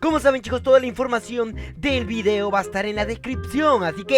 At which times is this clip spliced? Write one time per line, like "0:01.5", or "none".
0:02.9